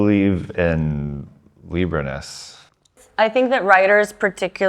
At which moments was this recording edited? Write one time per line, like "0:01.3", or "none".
0:02.9